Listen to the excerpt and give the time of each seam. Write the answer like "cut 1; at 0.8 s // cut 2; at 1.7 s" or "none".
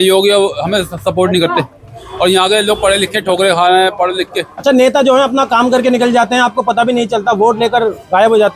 none